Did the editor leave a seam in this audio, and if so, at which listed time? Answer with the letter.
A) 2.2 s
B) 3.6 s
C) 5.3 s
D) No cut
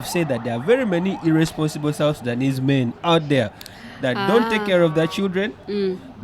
D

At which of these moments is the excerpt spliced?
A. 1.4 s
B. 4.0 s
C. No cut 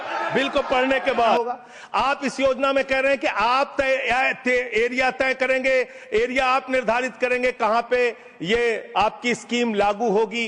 A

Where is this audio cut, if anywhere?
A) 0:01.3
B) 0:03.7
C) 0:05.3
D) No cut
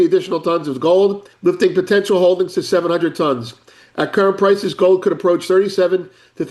A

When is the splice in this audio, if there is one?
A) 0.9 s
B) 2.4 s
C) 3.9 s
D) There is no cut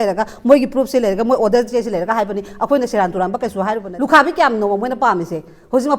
C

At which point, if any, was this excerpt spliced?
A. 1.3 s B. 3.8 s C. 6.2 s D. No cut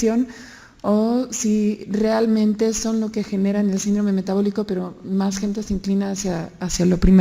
A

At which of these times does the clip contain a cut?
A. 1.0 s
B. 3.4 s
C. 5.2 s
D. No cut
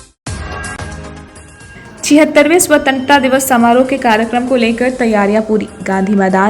A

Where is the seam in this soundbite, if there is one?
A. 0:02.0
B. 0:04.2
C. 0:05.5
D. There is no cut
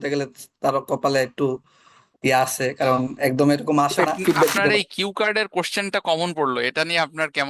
B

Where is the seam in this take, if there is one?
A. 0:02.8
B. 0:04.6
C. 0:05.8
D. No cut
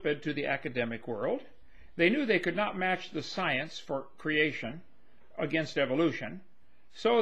B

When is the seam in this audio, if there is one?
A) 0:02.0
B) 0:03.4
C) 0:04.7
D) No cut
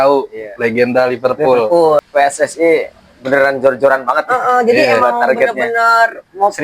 A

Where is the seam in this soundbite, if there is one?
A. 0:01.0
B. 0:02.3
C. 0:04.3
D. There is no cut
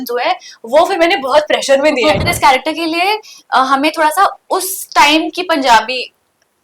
B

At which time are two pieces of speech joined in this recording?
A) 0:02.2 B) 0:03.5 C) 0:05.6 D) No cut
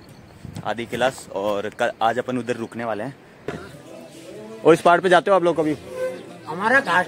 B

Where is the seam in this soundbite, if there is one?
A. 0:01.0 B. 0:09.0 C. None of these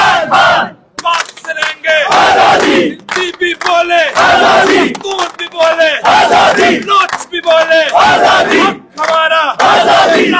A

